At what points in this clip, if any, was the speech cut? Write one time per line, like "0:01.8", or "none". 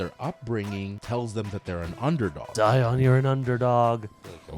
0:01.0
0:02.5